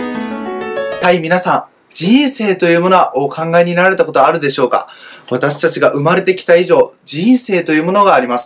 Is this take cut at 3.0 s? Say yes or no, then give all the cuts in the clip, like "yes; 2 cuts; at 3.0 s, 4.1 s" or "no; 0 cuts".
no; 1 cut; at 1.0 s